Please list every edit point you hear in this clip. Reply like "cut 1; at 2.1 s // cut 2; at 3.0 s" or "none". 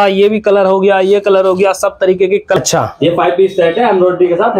cut 1; at 2.6 s